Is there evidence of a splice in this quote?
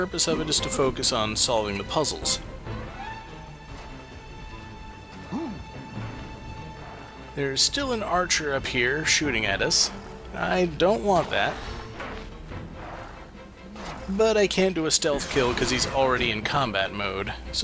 yes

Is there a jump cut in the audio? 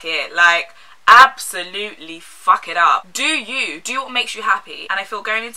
yes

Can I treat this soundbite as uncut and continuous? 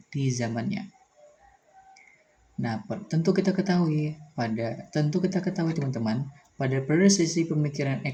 yes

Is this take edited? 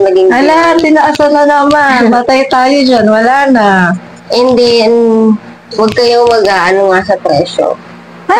no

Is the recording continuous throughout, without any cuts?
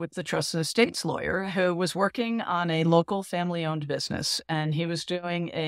yes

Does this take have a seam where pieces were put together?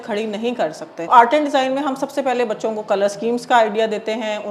yes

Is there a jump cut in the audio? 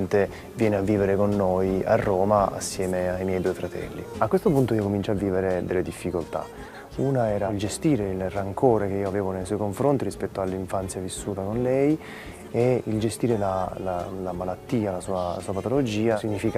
yes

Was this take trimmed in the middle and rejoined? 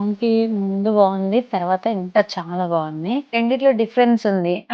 yes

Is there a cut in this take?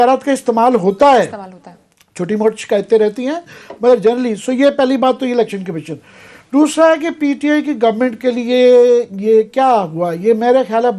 no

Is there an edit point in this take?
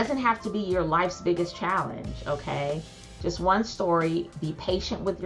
no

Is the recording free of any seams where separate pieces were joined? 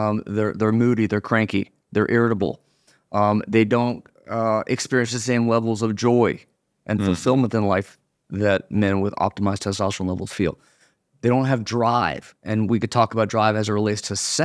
yes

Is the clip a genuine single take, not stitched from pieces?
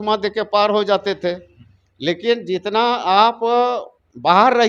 yes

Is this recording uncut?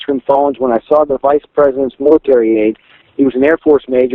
yes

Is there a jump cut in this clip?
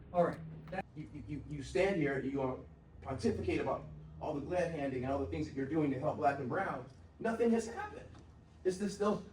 yes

